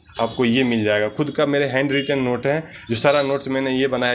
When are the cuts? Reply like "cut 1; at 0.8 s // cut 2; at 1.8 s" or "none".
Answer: none